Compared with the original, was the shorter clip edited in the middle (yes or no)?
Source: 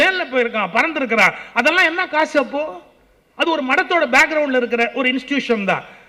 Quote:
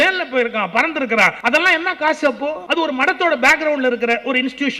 yes